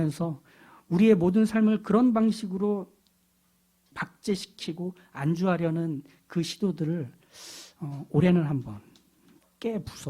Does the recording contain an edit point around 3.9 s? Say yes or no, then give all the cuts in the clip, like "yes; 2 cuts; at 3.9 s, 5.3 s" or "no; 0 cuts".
yes; 1 cut; at 3.9 s